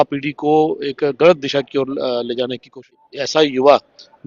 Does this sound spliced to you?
yes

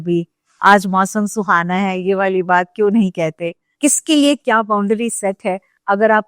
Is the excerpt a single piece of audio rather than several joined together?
no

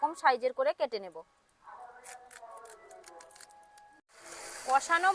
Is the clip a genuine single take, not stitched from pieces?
no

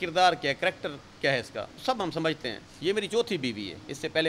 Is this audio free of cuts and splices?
no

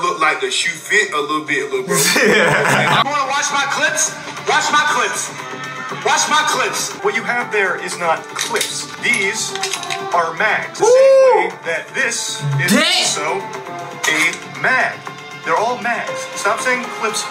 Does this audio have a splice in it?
yes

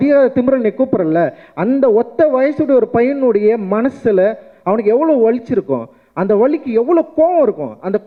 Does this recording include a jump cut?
no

